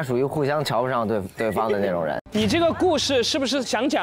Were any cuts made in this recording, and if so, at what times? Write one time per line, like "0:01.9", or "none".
0:02.2